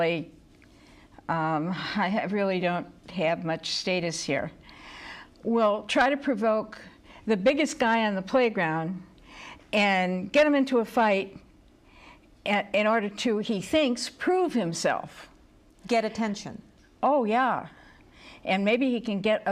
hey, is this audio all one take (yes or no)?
no